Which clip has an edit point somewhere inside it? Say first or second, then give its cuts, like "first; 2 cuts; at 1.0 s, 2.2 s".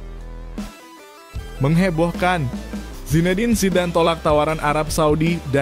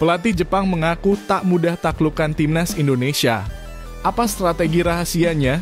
first; 1 cut; at 1.6 s